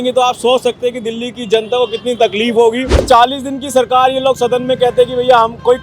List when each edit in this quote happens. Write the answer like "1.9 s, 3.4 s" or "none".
3.0 s